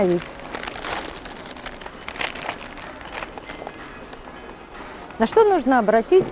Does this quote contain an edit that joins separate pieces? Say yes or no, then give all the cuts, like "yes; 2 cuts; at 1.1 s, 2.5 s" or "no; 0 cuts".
no; 0 cuts